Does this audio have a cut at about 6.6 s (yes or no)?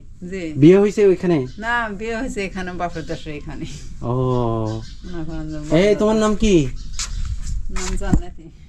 no